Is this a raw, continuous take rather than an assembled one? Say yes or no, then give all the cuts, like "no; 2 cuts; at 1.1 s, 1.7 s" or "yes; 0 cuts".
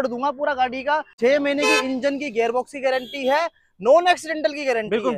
yes; 0 cuts